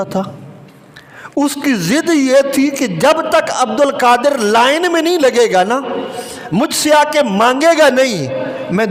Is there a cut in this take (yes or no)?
no